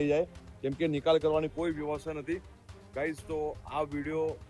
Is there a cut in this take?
no; 0 cuts

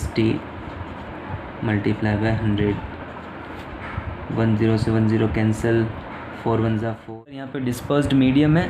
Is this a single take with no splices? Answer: no; 1 cut; at 7.6 s

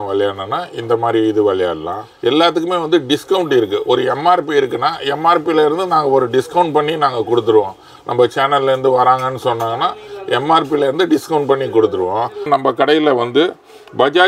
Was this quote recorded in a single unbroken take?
no; 2 cuts; at 2.1 s, 12.5 s

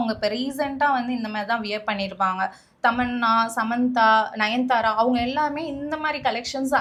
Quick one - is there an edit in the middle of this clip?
no; 0 cuts

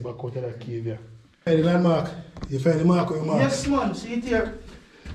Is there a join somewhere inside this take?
yes; 1 cut; at 1.4 s

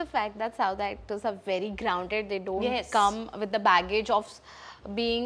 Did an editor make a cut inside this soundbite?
no; 0 cuts

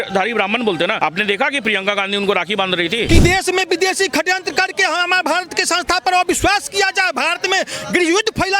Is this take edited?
yes; 2 cuts; at 0.9 s, 3.1 s

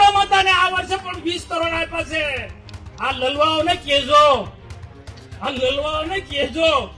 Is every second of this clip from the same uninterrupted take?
yes; 0 cuts

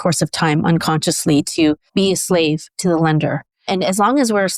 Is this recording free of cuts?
no; 1 cut; at 1.8 s

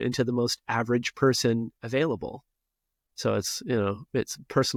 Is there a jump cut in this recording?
no; 0 cuts

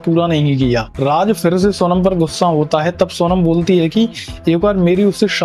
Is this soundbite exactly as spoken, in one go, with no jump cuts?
no; 1 cut; at 0.9 s

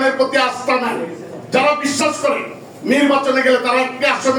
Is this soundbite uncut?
yes; 0 cuts

